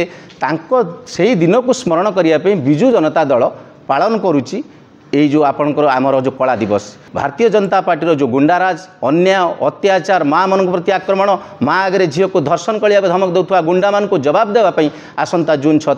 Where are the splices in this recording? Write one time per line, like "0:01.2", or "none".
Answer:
0:07.0